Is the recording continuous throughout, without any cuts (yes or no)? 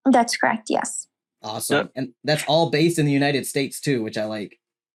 yes